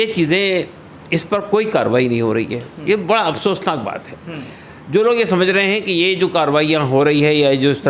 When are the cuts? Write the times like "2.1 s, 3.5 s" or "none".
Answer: none